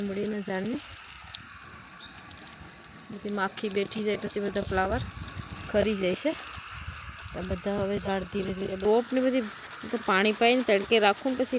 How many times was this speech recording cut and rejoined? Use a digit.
1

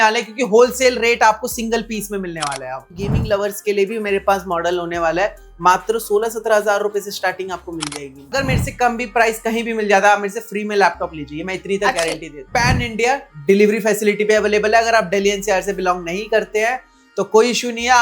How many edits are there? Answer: 3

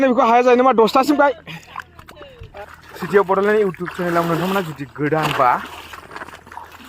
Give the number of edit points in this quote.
1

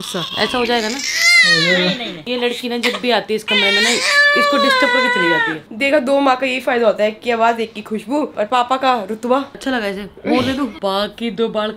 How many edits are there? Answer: 4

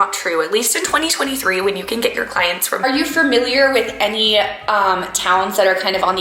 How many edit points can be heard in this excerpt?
1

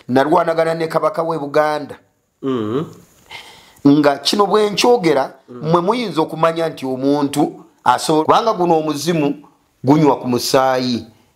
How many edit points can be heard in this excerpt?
1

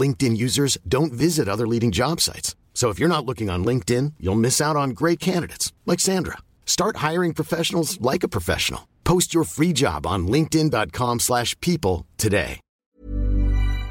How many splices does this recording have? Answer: 1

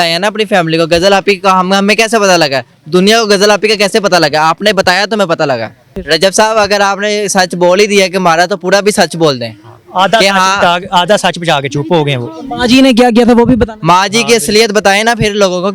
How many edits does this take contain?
1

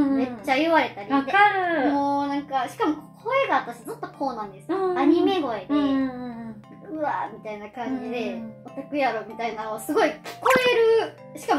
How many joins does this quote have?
0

